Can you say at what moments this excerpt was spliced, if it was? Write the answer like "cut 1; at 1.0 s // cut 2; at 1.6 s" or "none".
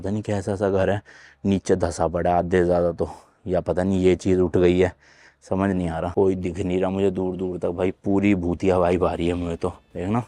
none